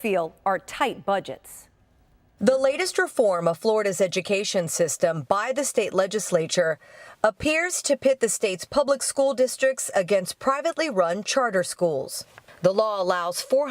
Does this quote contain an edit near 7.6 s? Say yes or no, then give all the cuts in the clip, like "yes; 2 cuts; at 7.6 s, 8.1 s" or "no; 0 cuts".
no; 1 cut; at 2.9 s